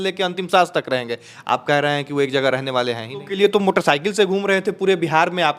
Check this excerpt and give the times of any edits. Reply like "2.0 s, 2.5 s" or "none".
3.2 s